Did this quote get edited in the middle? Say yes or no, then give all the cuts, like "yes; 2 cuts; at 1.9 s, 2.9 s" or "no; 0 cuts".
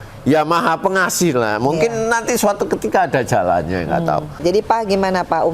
yes; 1 cut; at 4.3 s